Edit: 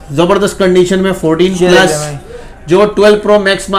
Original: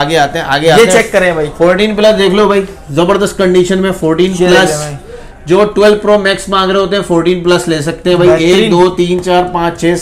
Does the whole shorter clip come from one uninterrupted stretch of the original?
yes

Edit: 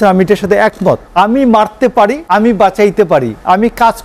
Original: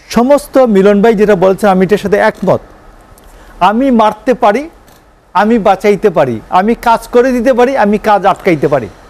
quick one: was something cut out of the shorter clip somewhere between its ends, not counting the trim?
yes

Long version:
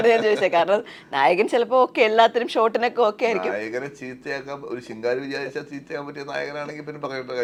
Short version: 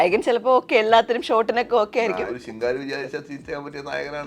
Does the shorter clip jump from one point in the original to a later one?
yes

